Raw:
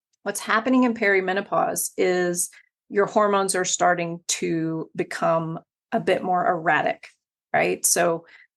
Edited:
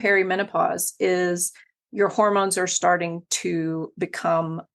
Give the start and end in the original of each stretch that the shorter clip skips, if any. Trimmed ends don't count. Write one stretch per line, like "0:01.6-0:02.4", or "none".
none